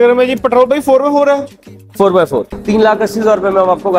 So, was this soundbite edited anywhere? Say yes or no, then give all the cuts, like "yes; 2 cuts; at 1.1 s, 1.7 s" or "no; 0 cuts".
yes; 1 cut; at 2.5 s